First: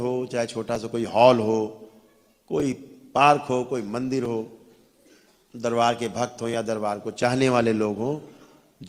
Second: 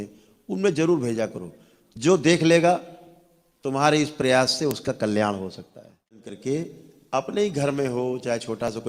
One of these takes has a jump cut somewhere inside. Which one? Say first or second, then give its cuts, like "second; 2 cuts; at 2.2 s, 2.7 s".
second; 1 cut; at 6.3 s